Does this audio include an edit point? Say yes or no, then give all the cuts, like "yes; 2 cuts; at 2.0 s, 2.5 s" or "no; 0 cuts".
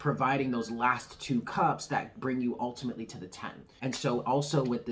yes; 1 cut; at 3.6 s